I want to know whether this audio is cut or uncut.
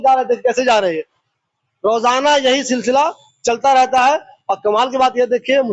uncut